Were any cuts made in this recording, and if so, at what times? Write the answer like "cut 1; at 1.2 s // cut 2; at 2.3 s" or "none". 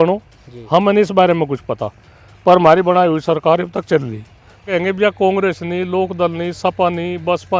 cut 1; at 4.7 s